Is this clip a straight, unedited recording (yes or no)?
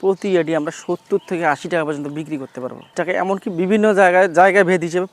no